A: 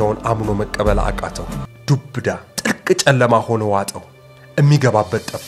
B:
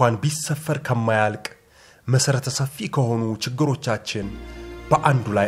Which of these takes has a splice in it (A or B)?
A